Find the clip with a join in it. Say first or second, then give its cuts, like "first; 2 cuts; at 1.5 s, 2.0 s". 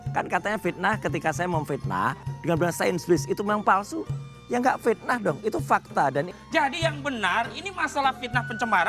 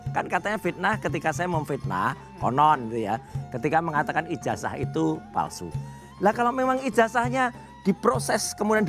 first; 2 cuts; at 2.3 s, 6.3 s